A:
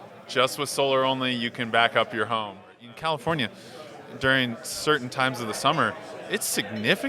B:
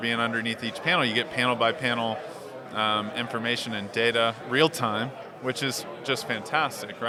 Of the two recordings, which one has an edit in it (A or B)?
A